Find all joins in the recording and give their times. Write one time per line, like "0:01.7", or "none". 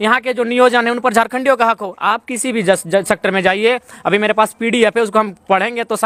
none